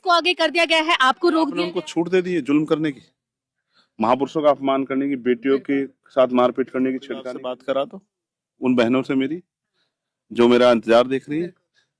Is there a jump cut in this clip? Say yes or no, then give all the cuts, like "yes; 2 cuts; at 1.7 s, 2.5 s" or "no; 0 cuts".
yes; 2 cuts; at 1.7 s, 7.3 s